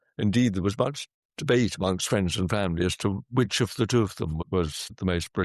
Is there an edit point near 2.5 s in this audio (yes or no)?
no